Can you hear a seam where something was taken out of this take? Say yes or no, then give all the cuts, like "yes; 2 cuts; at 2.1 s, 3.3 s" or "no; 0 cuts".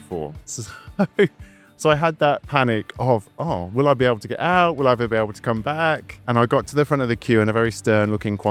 no; 0 cuts